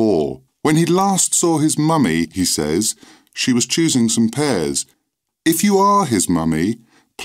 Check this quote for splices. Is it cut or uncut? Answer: cut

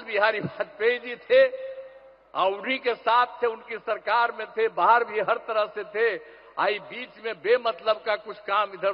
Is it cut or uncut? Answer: uncut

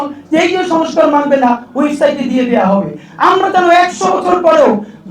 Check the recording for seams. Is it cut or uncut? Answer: uncut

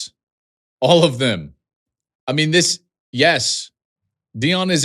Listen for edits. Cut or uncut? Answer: uncut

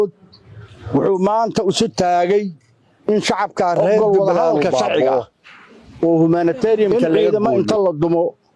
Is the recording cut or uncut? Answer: cut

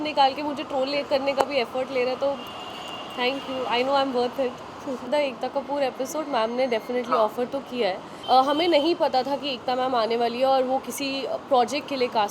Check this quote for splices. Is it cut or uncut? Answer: cut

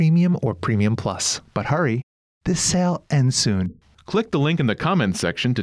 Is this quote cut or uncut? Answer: cut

